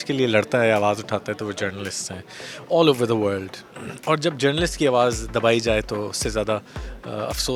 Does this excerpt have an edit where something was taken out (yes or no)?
no